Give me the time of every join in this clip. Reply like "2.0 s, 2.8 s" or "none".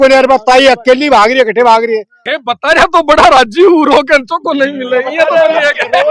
2.2 s